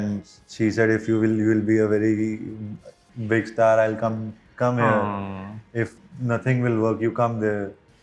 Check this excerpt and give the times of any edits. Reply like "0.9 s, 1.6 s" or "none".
none